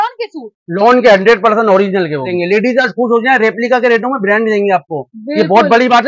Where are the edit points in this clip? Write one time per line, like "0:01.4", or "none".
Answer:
0:02.3